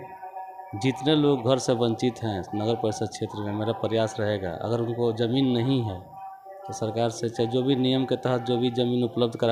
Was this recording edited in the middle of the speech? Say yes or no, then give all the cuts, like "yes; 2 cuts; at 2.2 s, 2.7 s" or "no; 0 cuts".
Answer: no; 0 cuts